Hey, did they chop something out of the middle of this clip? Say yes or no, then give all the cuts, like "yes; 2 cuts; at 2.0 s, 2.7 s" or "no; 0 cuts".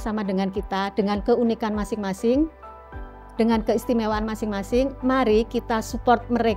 no; 0 cuts